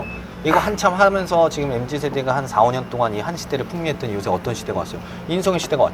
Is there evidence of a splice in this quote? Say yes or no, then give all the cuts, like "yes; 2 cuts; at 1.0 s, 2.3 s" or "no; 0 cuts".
no; 0 cuts